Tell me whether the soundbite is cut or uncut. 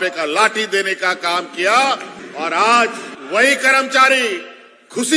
cut